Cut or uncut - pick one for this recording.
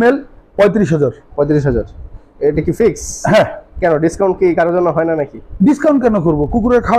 uncut